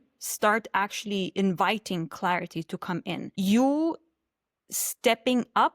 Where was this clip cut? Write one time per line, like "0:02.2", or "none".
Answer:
0:03.3